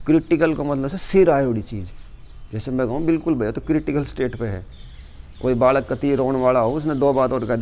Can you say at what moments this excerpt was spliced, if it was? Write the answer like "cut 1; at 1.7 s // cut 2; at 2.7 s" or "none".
none